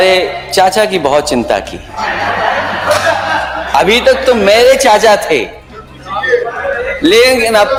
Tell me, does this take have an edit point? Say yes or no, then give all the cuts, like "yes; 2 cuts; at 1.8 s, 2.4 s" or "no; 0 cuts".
no; 0 cuts